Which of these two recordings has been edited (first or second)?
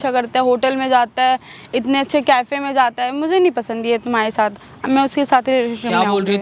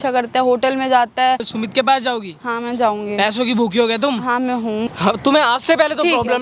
second